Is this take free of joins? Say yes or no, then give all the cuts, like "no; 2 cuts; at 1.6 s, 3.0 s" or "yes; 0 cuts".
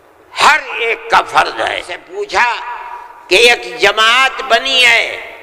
no; 1 cut; at 2.0 s